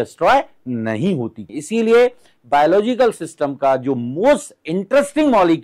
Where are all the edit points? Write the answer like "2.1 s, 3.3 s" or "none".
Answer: 1.4 s